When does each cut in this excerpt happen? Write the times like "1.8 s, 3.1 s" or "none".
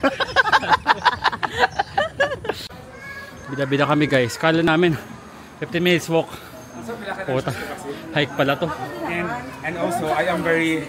2.7 s

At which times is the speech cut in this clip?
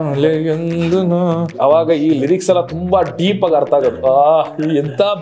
1.5 s

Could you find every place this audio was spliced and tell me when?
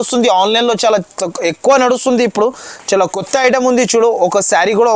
none

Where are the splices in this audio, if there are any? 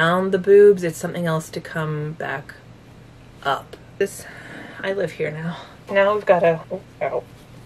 5.7 s, 6.6 s

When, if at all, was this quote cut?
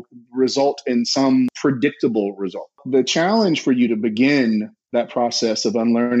1.5 s, 2.8 s

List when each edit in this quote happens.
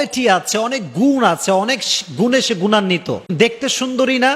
3.3 s

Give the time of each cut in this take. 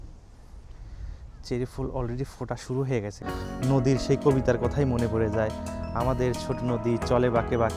3.2 s

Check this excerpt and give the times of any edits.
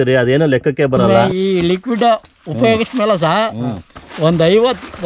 1.1 s

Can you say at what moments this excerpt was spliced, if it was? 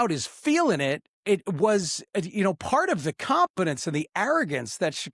1.1 s

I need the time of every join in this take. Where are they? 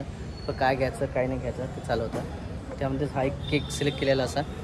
none

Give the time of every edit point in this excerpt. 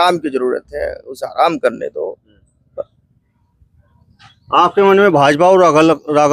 none

